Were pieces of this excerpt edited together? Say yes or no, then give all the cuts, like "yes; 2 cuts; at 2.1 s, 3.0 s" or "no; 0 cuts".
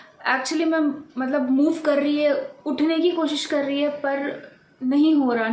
no; 0 cuts